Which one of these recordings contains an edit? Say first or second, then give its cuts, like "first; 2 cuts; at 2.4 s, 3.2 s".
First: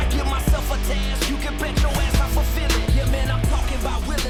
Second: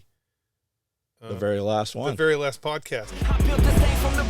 second; 1 cut; at 3.1 s